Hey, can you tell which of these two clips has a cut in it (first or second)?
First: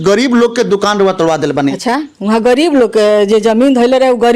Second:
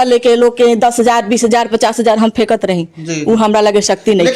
first